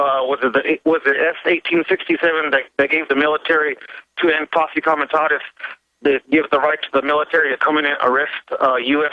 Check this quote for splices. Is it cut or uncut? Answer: uncut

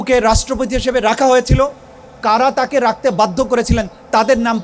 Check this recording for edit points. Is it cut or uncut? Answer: uncut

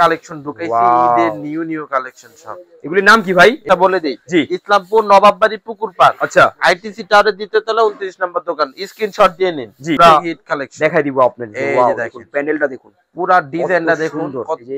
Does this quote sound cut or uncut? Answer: cut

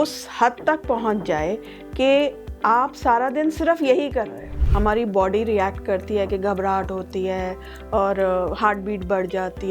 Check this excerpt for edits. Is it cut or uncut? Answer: cut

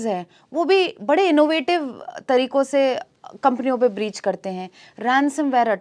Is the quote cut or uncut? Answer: uncut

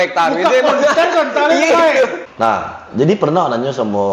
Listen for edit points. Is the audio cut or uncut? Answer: cut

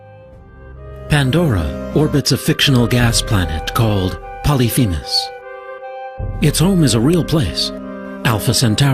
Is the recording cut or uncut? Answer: cut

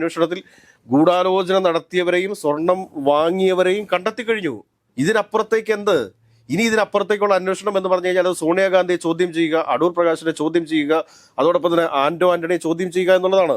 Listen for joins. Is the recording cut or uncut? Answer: uncut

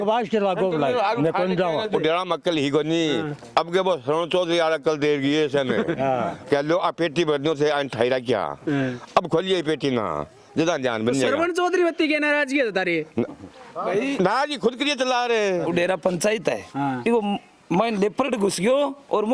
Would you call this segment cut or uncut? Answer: cut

